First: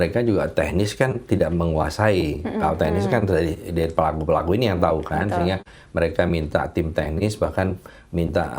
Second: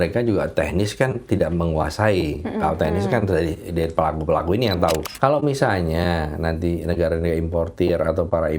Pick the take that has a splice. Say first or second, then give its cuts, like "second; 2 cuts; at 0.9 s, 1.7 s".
second; 1 cut; at 5.1 s